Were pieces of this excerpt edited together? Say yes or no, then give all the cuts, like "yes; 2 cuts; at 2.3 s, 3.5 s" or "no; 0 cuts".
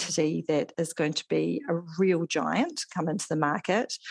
no; 0 cuts